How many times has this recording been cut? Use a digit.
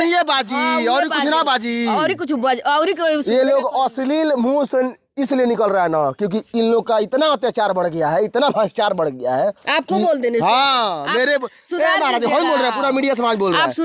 0